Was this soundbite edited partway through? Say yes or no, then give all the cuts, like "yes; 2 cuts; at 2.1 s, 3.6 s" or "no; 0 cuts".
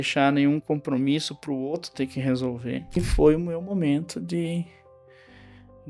yes; 1 cut; at 3.0 s